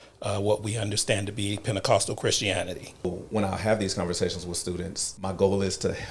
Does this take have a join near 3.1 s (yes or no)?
yes